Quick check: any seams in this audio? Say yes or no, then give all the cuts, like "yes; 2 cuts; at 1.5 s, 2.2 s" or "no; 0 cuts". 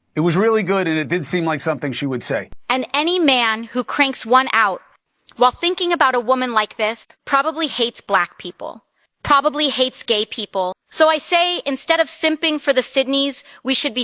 yes; 2 cuts; at 2.5 s, 10.8 s